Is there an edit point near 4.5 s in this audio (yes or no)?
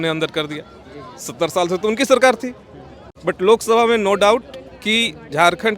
no